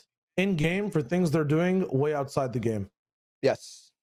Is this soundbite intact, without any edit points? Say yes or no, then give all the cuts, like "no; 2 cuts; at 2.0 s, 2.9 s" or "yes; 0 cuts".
yes; 0 cuts